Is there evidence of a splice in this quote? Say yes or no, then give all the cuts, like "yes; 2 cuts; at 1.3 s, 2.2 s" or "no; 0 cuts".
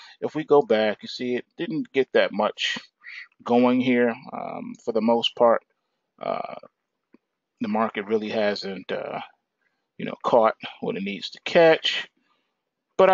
yes; 1 cut; at 10.3 s